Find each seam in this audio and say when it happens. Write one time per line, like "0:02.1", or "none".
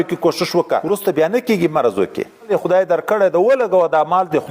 0:00.8
0:02.5